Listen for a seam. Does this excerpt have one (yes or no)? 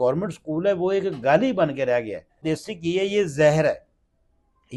yes